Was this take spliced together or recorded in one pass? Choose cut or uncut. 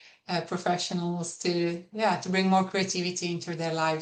uncut